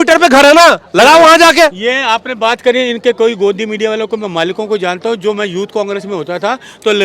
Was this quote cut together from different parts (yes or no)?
no